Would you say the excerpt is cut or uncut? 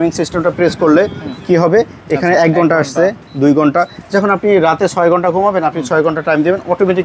uncut